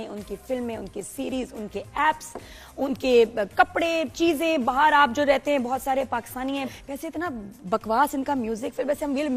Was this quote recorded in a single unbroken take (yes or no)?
no